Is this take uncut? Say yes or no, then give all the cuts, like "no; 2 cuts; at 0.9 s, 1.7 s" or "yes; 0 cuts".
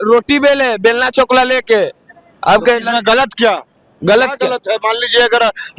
yes; 0 cuts